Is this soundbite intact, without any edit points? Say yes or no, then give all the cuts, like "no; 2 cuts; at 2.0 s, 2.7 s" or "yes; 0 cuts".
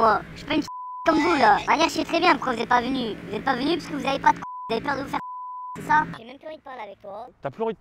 no; 2 cuts; at 1.6 s, 6.2 s